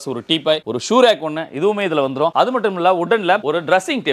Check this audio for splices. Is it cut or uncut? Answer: uncut